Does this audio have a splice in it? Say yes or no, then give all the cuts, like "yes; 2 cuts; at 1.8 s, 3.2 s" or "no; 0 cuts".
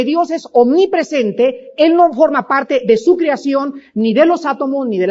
yes; 1 cut; at 2.2 s